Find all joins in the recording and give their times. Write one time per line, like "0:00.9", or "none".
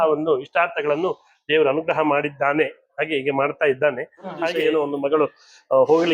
0:04.5